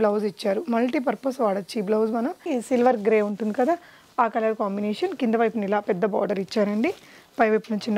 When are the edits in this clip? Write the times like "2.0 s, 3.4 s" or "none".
2.5 s